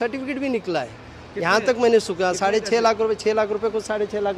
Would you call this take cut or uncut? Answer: uncut